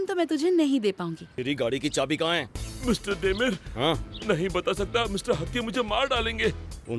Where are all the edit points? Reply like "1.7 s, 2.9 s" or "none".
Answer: 1.2 s

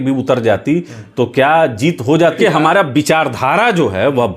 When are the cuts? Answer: 2.4 s

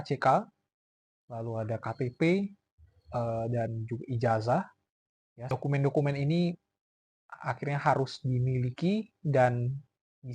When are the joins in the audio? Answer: none

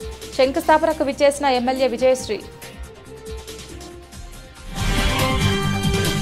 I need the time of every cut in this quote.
2.5 s

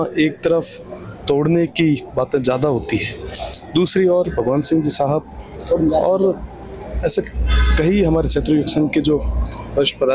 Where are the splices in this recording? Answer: none

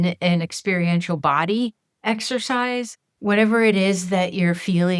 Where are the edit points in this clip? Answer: 1.9 s, 3.0 s

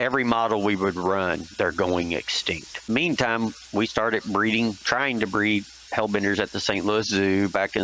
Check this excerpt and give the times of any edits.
2.9 s

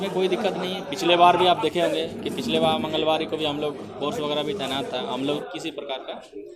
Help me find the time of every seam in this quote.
5.4 s

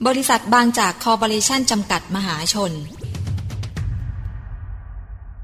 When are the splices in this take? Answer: 3.1 s

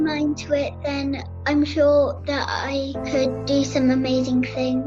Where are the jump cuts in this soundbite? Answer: 1.3 s, 3.0 s

